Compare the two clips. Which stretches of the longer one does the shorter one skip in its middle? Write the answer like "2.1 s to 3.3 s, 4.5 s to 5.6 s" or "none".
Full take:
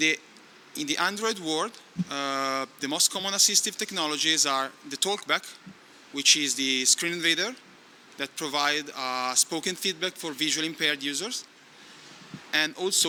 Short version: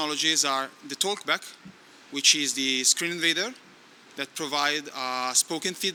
none

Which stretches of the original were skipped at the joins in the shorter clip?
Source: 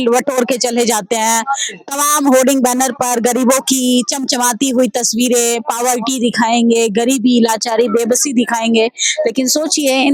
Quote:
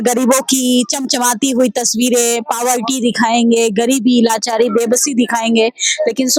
none

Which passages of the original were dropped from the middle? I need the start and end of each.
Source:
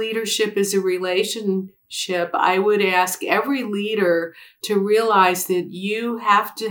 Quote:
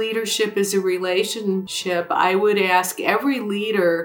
1.7 s to 2.0 s

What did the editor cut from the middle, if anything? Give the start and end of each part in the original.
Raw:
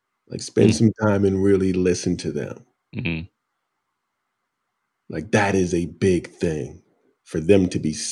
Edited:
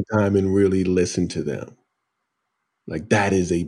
2.7 s to 4.1 s

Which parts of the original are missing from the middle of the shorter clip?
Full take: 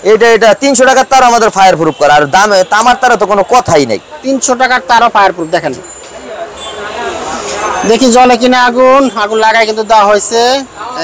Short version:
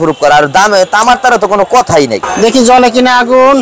4.1 s to 7.7 s

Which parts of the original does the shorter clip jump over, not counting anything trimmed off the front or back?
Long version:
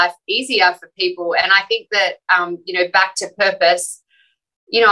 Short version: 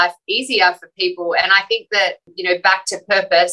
2.2 s to 2.5 s

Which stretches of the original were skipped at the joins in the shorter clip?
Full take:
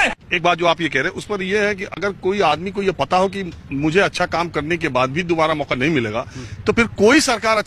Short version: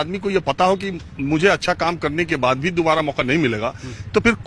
none

